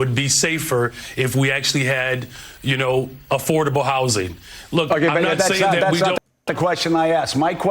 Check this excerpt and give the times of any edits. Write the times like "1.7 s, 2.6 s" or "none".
6.4 s